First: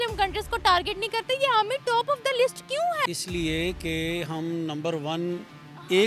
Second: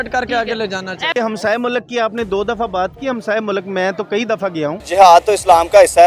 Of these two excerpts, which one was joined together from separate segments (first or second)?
second